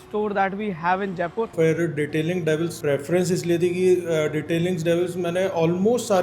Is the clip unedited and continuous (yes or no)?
no